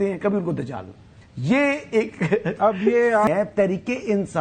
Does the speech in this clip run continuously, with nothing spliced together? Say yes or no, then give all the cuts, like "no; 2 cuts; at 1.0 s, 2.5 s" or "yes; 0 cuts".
no; 1 cut; at 3.3 s